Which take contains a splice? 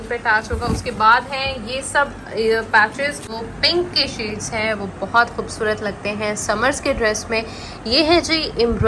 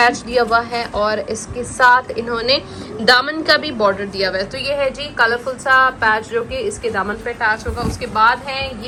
first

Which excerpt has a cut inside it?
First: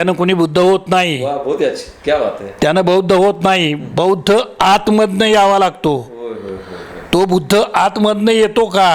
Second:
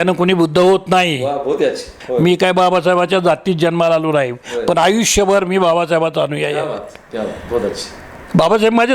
second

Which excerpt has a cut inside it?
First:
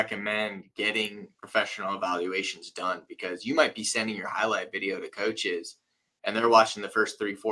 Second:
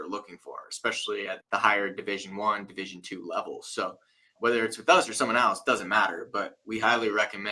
second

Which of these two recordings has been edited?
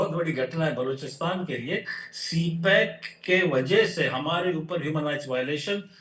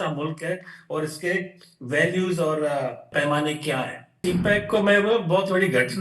second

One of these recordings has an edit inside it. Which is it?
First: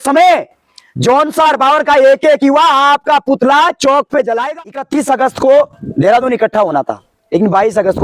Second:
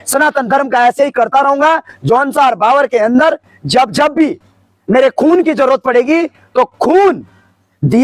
first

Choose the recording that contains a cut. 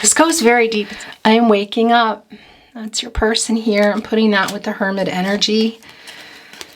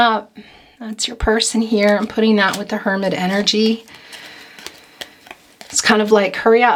first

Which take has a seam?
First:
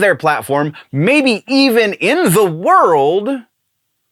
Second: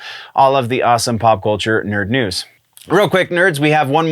second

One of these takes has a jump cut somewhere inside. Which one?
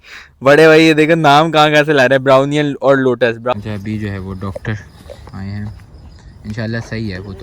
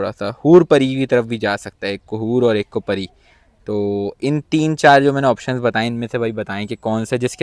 first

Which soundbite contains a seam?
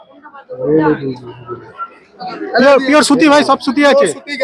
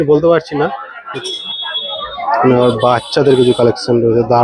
second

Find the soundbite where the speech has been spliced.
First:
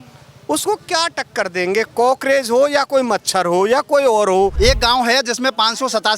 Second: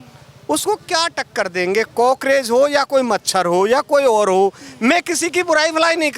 first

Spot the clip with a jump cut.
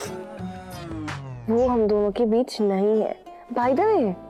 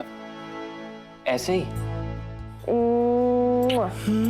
second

